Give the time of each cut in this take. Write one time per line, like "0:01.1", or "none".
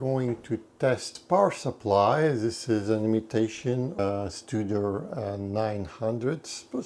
0:01.1
0:04.0